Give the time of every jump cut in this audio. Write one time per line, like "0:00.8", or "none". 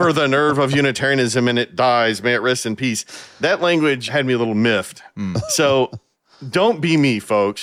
none